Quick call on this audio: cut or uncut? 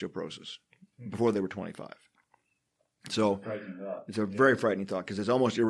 uncut